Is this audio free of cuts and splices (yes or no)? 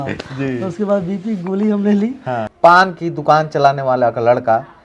no